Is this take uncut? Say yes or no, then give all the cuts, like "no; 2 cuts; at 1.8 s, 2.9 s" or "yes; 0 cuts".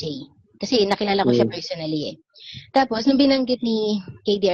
yes; 0 cuts